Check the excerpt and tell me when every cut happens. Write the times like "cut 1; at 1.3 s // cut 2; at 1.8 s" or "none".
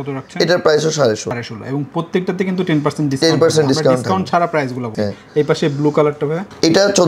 none